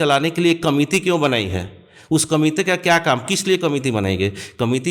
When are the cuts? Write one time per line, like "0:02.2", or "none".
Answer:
none